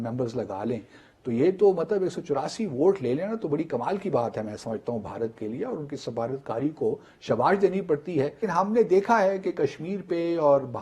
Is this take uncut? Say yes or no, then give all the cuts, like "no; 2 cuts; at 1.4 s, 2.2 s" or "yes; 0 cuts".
no; 1 cut; at 8.4 s